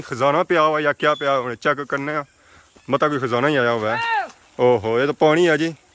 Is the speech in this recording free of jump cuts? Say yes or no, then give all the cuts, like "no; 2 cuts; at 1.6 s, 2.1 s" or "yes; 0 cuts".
yes; 0 cuts